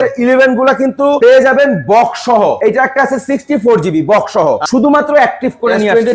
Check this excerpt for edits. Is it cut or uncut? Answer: cut